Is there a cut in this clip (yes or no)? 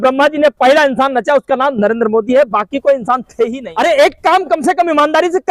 yes